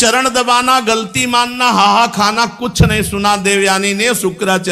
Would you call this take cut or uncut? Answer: uncut